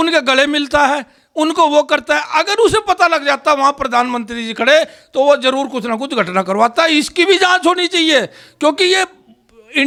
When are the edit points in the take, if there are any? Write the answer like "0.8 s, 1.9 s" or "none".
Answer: none